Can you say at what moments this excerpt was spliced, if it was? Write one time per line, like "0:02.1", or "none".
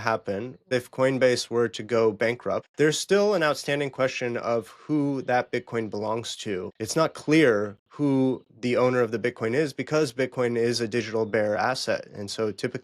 0:00.7
0:02.7
0:06.7

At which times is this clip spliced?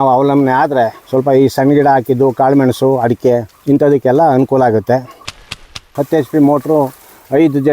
0:01.0
0:03.5
0:05.6

